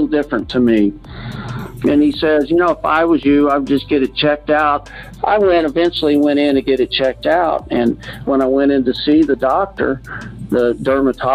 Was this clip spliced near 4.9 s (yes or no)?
yes